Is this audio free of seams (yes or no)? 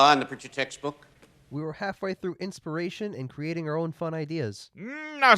yes